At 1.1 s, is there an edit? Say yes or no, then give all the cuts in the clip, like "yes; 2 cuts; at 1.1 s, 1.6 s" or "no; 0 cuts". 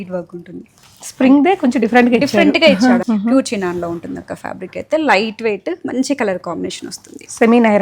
no; 1 cut; at 3.0 s